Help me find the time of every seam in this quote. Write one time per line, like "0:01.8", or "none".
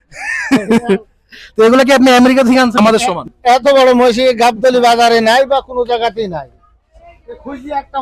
0:02.8